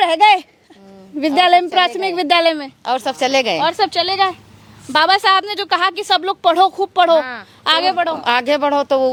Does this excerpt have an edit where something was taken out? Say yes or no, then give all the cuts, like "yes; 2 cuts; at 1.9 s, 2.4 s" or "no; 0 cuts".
no; 0 cuts